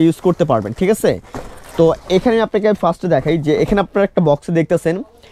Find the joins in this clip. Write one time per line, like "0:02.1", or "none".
none